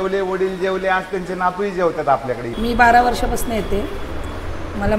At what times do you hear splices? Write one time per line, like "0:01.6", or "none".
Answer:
0:02.6